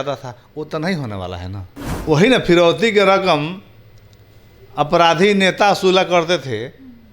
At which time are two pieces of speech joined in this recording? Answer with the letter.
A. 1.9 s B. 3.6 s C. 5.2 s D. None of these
A